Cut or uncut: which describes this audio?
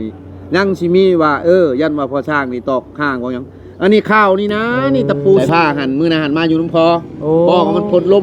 cut